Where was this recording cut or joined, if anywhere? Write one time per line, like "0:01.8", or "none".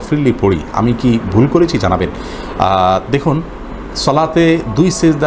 none